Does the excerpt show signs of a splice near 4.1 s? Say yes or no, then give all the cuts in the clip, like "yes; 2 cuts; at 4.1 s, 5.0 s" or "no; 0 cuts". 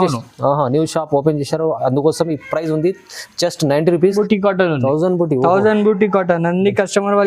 yes; 1 cut; at 4.1 s